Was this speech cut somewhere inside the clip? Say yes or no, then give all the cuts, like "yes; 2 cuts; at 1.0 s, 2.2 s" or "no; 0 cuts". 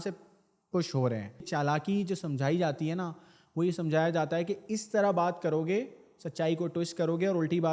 yes; 1 cut; at 1.5 s